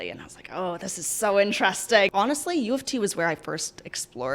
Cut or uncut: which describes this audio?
cut